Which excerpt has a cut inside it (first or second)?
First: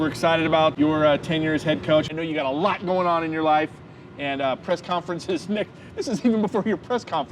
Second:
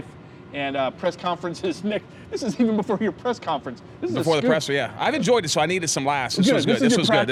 first